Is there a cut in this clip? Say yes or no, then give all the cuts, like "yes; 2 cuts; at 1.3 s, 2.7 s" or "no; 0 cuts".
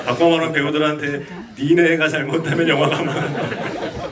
no; 0 cuts